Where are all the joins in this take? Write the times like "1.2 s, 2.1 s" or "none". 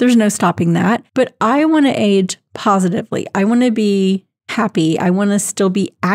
none